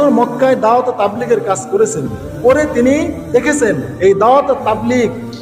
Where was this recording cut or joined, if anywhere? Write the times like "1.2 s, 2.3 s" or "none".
none